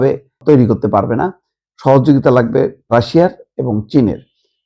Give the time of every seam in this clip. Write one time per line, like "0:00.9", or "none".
0:02.9